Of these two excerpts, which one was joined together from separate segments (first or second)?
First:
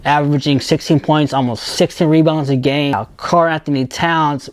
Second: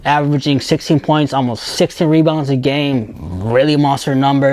first